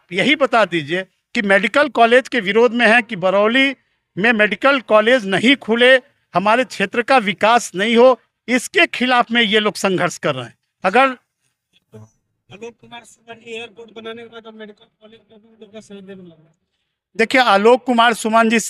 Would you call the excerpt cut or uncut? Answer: uncut